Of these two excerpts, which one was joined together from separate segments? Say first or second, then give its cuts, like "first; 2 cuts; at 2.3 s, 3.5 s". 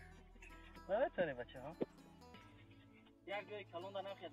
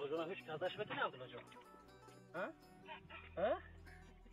first; 1 cut; at 2.5 s